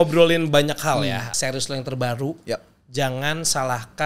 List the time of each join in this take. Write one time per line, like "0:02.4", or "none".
0:01.3